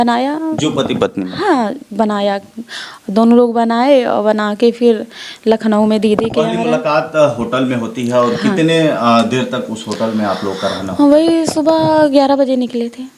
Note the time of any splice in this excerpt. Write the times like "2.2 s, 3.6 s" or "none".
none